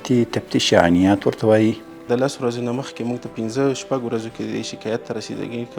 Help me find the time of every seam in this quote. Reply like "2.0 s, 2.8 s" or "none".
2.0 s